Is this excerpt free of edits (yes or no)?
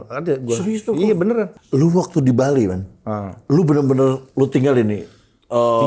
no